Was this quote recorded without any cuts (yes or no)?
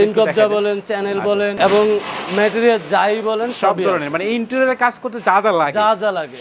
yes